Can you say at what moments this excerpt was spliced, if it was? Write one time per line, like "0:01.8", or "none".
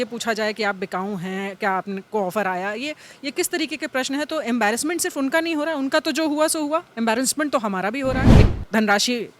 0:08.3